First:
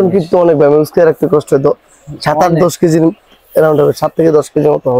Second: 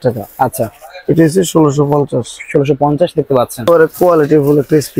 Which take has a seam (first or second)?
second